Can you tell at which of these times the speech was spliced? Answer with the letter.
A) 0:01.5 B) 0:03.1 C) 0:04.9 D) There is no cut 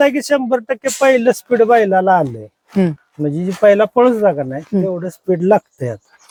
D